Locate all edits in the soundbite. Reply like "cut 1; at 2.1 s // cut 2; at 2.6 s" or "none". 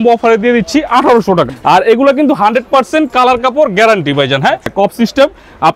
cut 1; at 1.5 s // cut 2; at 4.7 s